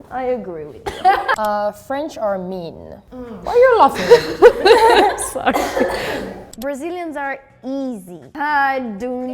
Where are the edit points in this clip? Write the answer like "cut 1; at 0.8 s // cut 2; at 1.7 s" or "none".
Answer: cut 1; at 1.3 s // cut 2; at 6.5 s // cut 3; at 8.2 s